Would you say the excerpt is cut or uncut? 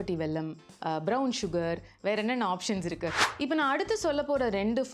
cut